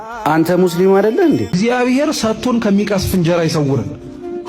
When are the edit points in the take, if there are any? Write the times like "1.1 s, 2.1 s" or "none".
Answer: 1.5 s